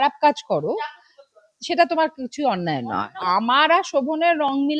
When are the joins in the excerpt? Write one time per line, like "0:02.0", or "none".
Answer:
0:03.2